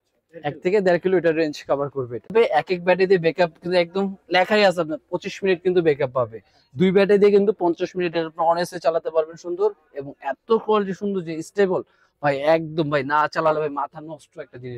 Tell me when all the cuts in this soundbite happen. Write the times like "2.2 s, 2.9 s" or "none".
2.3 s